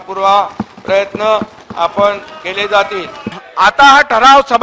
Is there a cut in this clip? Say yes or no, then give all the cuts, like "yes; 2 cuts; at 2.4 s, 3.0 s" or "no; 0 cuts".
yes; 1 cut; at 3.4 s